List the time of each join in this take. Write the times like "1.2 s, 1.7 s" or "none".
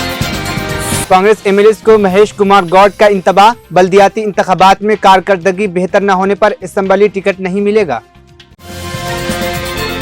1.0 s